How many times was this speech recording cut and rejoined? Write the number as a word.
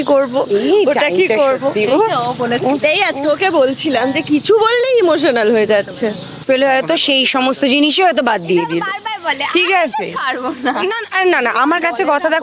one